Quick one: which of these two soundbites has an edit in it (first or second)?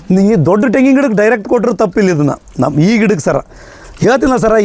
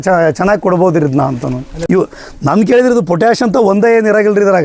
second